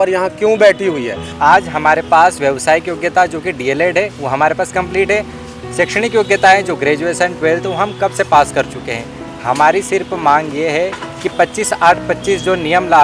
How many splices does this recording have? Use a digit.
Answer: 1